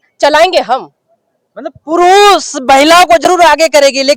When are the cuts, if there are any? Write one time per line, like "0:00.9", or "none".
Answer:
none